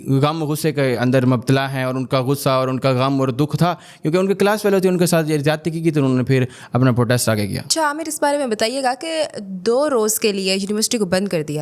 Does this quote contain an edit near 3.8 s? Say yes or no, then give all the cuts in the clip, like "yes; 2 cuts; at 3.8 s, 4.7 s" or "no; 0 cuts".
no; 0 cuts